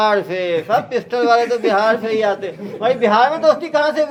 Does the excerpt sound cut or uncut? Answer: uncut